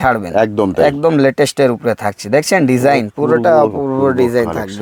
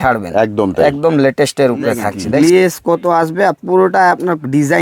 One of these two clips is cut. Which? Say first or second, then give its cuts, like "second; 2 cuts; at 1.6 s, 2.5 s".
second; 1 cut; at 2.2 s